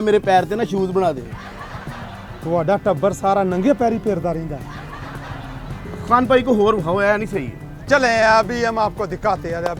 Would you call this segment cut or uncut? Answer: uncut